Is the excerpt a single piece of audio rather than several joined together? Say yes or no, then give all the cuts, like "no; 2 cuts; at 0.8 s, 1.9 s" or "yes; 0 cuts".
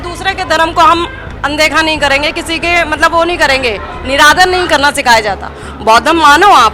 yes; 0 cuts